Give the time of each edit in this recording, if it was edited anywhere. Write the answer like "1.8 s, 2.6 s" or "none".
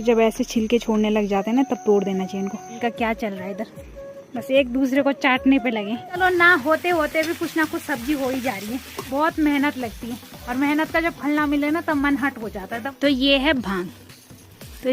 2.8 s, 6.2 s, 9.0 s, 12.9 s